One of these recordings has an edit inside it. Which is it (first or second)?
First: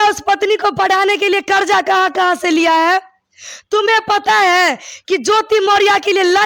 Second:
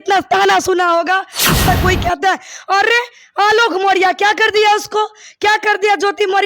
second